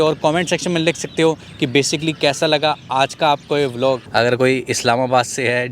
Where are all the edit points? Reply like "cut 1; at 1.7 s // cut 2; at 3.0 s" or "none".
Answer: cut 1; at 4.0 s